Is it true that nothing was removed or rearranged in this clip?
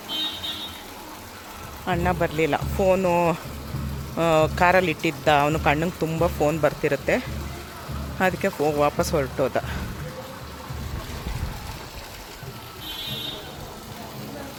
yes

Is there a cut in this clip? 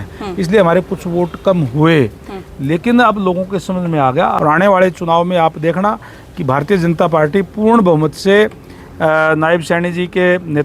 yes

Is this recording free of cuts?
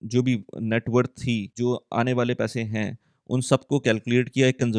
no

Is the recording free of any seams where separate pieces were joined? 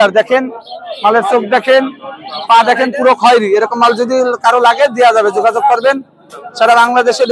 yes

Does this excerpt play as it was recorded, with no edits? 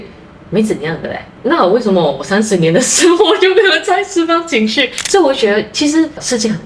no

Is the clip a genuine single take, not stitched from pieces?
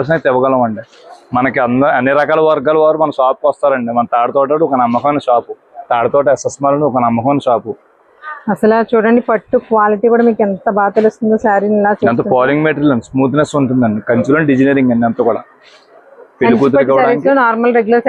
yes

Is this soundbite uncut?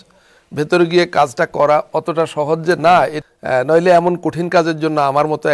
no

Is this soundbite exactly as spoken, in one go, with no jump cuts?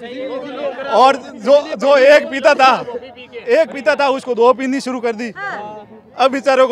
yes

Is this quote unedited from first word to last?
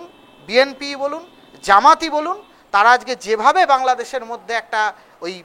yes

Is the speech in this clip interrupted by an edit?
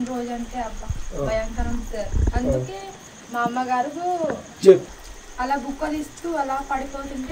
yes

